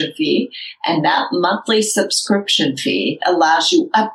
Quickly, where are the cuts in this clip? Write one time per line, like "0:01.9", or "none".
none